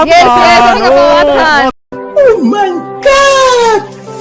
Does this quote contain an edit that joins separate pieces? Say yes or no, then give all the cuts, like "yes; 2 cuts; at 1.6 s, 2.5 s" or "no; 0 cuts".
no; 0 cuts